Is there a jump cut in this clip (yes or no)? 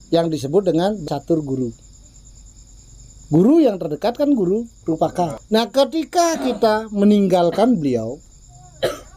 yes